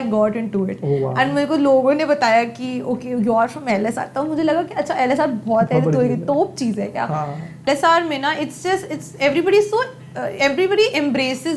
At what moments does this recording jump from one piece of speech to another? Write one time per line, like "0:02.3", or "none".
0:07.6